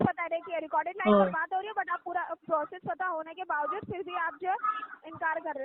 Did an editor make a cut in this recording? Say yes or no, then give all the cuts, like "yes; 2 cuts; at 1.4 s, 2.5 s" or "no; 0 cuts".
no; 0 cuts